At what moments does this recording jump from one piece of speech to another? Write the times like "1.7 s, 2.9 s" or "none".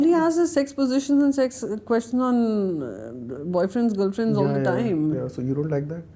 none